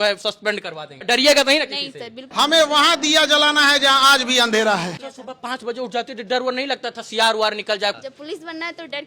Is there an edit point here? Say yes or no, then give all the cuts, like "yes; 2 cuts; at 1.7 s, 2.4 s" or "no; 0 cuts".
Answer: yes; 4 cuts; at 1.0 s, 2.2 s, 4.9 s, 8.0 s